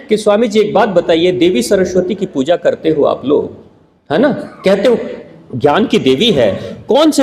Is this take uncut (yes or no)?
yes